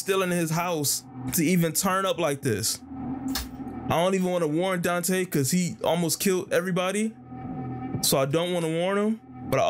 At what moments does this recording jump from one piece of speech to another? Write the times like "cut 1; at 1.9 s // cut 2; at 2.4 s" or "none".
none